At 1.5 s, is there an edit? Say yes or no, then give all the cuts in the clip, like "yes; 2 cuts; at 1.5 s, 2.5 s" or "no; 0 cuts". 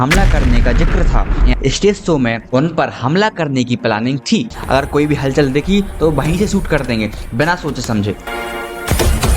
yes; 2 cuts; at 1.5 s, 4.5 s